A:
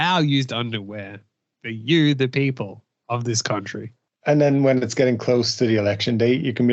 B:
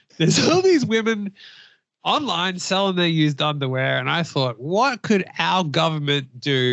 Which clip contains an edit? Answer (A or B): A